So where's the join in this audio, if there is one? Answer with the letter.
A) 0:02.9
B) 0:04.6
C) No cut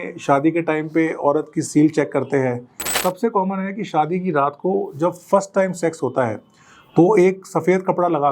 A